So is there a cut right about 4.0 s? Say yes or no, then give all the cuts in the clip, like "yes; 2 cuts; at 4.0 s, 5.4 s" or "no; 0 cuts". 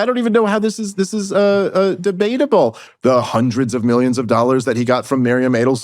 no; 1 cut; at 2.8 s